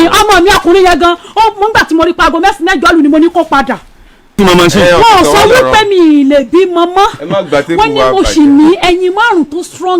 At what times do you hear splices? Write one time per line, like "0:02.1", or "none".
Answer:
0:04.4